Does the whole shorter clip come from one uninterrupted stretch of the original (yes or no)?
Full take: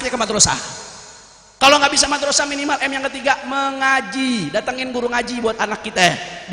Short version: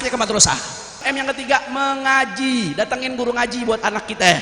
no